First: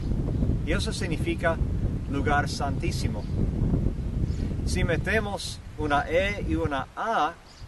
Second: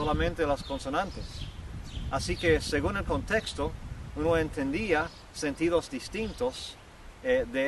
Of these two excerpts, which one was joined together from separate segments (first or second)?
first